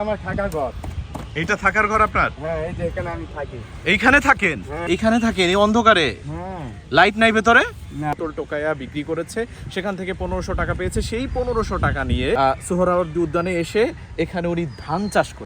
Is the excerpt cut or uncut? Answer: cut